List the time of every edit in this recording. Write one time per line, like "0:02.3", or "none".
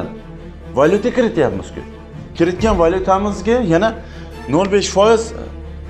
none